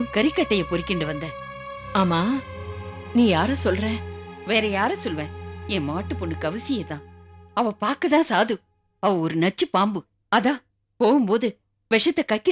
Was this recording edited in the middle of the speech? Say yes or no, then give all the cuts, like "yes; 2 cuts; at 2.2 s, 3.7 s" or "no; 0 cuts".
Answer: no; 0 cuts